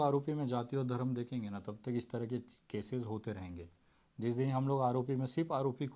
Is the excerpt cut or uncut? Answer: uncut